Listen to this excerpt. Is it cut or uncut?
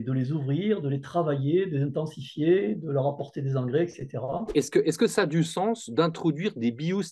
cut